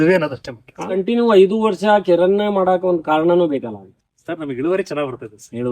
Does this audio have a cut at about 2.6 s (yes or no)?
no